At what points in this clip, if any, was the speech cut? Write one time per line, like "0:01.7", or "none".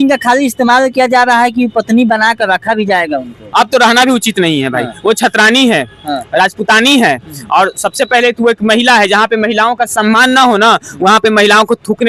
none